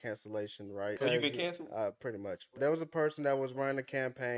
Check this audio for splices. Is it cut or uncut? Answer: cut